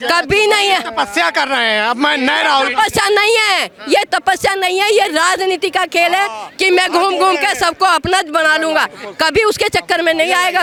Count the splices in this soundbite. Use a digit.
0